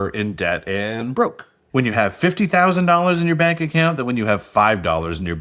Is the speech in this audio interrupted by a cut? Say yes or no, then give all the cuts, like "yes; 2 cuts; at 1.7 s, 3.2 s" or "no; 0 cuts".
yes; 1 cut; at 1.5 s